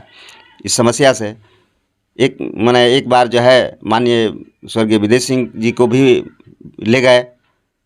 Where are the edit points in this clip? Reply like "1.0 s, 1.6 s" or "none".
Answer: none